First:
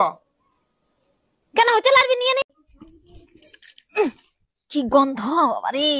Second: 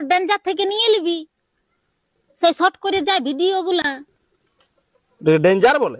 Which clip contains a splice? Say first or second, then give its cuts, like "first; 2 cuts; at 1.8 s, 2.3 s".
first; 1 cut; at 2.6 s